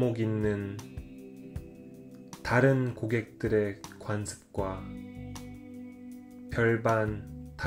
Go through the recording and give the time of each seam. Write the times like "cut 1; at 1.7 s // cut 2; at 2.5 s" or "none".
cut 1; at 4.8 s // cut 2; at 6.4 s